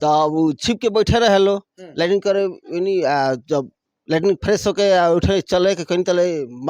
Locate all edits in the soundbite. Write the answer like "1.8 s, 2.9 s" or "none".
none